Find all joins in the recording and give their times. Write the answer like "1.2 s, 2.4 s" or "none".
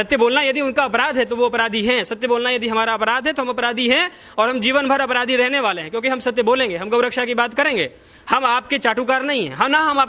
none

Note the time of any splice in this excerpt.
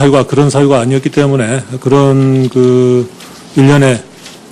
2.3 s

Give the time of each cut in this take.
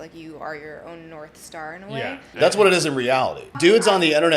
2.3 s, 3.6 s

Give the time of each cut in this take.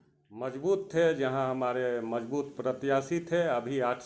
none

